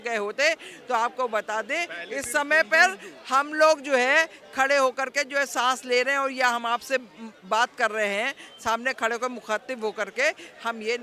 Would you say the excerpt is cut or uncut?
uncut